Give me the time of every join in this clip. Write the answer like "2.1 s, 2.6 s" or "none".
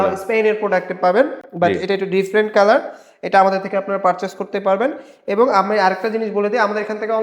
none